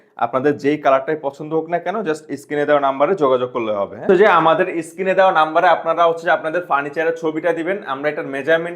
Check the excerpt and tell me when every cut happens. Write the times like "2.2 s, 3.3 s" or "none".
4.1 s